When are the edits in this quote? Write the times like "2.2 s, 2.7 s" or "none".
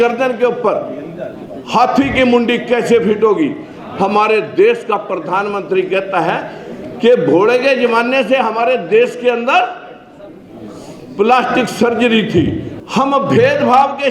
12.7 s